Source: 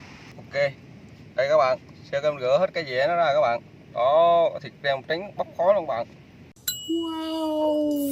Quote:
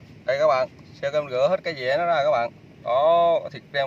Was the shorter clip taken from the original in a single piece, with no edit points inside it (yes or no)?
yes